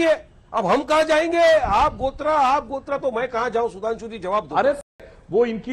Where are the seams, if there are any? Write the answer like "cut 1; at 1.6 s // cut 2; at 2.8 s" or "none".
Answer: cut 1; at 1.6 s // cut 2; at 4.9 s